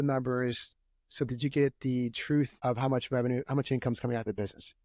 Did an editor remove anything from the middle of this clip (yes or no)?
yes